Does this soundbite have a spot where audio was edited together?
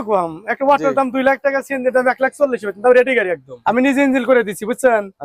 yes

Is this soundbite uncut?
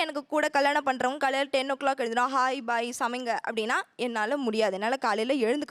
yes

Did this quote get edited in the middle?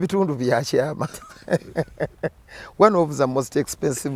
no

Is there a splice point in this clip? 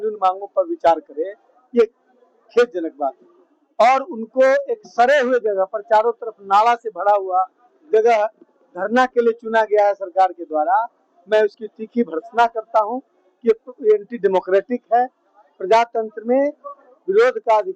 no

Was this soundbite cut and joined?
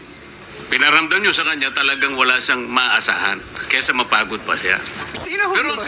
yes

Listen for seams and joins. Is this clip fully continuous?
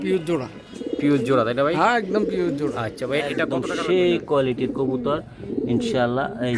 no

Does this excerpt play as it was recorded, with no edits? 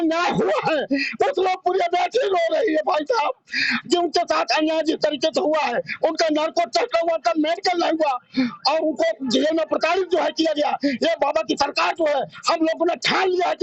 yes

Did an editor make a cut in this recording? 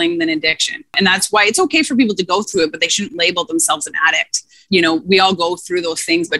yes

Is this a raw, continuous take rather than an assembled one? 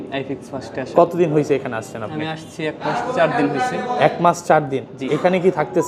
yes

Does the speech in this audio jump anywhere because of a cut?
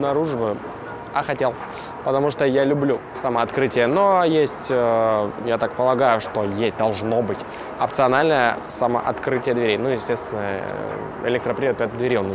no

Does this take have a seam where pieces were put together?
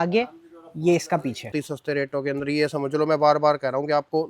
yes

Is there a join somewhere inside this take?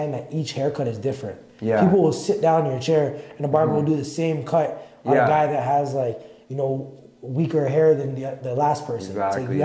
no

